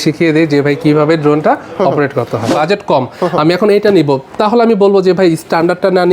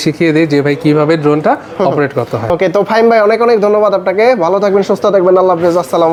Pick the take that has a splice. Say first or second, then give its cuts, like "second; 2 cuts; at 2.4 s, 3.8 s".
first; 1 cut; at 2.5 s